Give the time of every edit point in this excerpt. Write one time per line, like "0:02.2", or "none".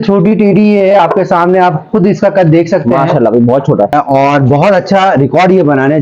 0:03.9